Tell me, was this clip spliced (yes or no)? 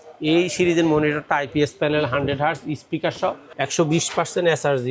yes